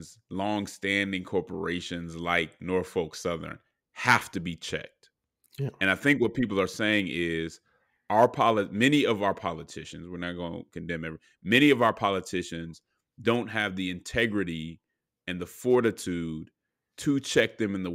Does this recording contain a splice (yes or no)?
no